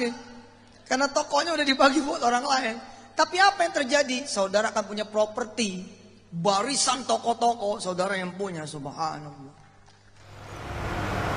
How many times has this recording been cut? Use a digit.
0